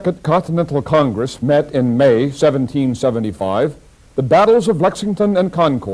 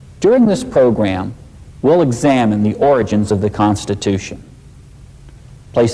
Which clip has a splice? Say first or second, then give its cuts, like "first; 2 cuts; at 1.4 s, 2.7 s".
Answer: second; 1 cut; at 2.3 s